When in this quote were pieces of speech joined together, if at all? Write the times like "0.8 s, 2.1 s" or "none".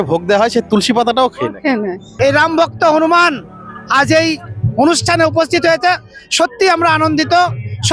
2.0 s